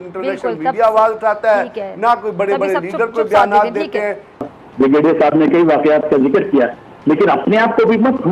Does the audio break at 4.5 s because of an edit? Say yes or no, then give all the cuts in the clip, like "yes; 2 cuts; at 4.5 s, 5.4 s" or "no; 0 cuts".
yes; 1 cut; at 4.5 s